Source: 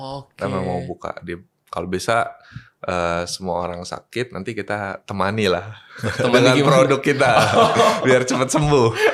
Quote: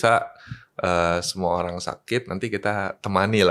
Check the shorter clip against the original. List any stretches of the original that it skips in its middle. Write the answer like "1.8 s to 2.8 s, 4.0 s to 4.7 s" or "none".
none